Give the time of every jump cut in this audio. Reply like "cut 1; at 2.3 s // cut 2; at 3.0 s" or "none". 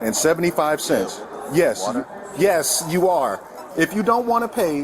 cut 1; at 3.6 s